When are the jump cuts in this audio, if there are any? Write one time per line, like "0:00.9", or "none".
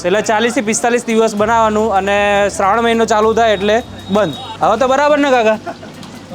0:04.4